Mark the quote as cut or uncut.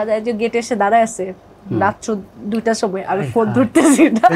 uncut